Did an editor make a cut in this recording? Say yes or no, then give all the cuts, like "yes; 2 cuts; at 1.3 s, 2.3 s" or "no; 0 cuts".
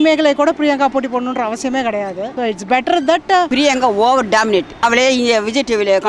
yes; 3 cuts; at 2.3 s, 3.5 s, 4.8 s